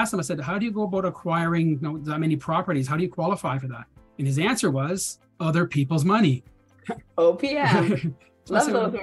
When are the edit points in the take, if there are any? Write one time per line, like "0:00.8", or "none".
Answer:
none